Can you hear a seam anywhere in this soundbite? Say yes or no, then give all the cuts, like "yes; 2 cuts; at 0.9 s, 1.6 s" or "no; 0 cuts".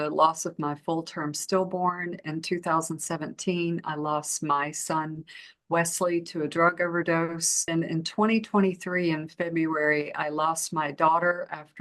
yes; 1 cut; at 7.7 s